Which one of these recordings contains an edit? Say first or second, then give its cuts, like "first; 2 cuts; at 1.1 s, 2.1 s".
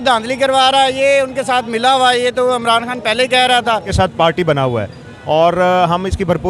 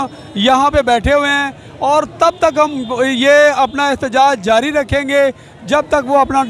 first; 1 cut; at 3.9 s